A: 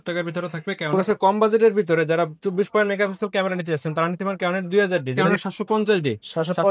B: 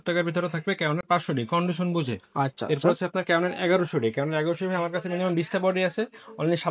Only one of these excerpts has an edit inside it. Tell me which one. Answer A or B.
A